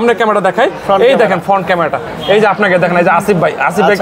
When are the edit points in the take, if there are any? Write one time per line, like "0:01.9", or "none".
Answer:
none